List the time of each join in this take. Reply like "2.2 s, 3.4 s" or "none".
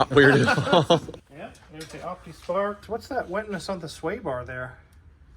1.2 s, 2.8 s